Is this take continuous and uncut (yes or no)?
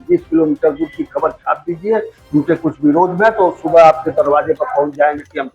yes